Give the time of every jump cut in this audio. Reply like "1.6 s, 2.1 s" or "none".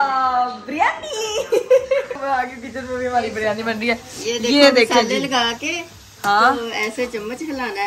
none